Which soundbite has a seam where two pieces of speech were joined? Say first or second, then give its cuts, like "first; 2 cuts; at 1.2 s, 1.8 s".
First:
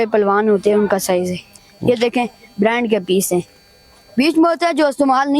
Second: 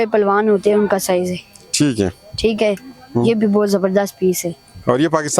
first; 1 cut; at 1.6 s